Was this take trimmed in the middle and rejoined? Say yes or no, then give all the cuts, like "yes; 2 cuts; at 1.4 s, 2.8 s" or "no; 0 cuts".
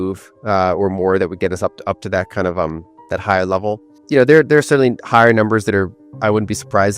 yes; 1 cut; at 3.9 s